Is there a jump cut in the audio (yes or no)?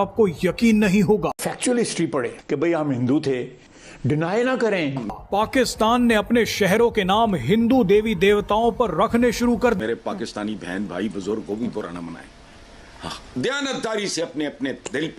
yes